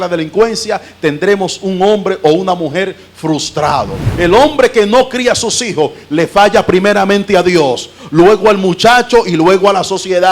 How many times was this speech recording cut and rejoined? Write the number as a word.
one